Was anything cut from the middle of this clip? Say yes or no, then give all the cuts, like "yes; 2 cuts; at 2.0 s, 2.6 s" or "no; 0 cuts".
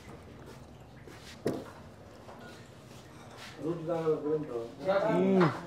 yes; 1 cut; at 1.4 s